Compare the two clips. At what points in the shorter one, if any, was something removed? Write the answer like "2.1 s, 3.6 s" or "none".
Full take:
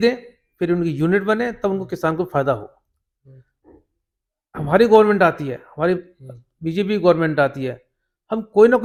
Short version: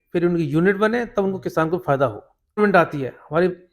2.6 s

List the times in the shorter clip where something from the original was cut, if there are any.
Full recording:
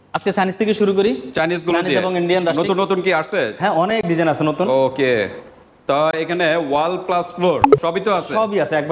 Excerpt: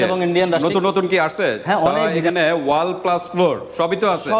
2.1 s

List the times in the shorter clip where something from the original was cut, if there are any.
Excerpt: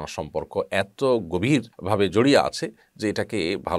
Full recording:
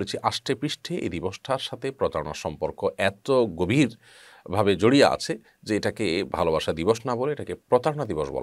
1.7 s

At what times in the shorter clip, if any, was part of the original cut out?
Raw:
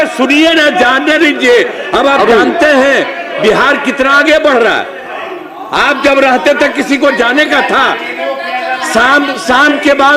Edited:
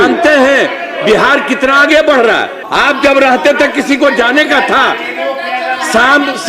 2.6 s

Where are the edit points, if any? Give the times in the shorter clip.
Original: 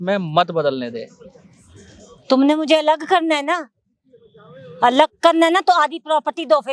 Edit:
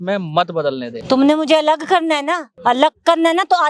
0.9 s, 2.5 s

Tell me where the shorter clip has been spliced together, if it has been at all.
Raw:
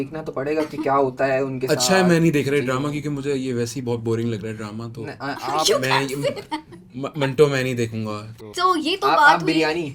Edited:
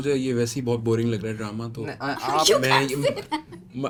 none

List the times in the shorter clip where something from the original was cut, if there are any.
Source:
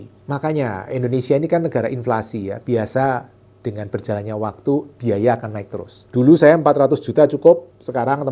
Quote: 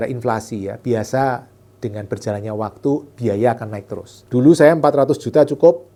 none

